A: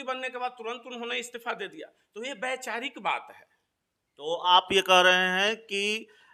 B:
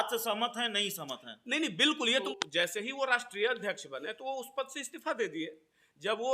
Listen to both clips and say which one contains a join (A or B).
B